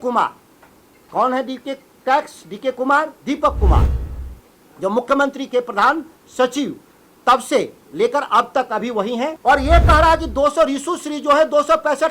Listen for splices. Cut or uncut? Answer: cut